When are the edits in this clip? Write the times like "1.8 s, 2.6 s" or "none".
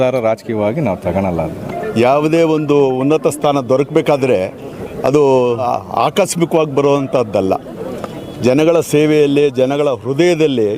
1.7 s, 5.7 s